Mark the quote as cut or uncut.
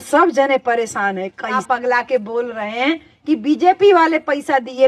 cut